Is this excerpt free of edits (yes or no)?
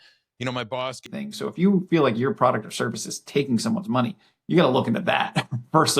no